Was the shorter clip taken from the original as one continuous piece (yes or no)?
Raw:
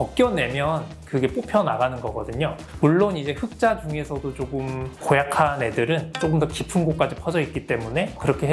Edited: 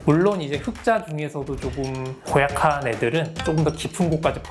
yes